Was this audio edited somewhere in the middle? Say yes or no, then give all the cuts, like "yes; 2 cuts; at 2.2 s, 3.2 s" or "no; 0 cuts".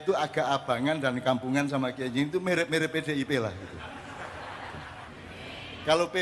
yes; 1 cut; at 5.0 s